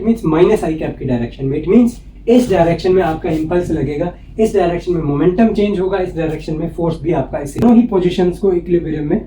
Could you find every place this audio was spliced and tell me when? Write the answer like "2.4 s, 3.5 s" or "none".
7.6 s